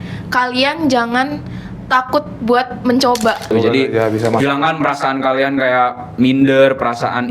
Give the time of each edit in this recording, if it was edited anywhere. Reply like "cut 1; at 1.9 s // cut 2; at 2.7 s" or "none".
cut 1; at 3.5 s